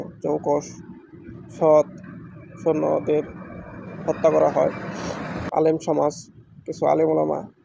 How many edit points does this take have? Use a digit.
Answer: 1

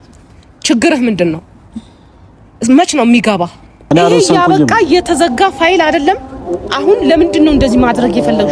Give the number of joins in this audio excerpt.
1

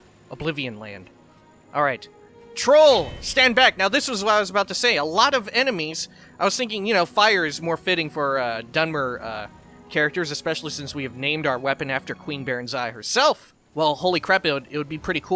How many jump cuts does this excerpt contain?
1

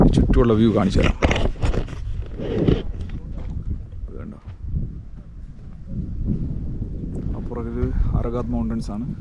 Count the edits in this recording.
0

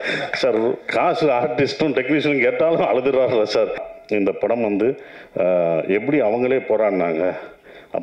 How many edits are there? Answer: 1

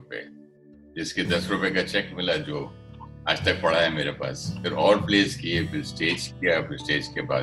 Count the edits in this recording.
1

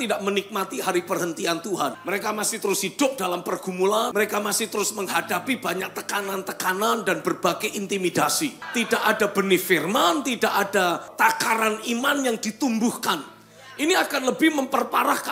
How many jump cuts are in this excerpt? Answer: 4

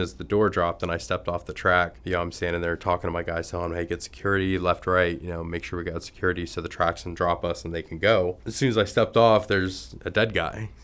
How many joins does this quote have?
2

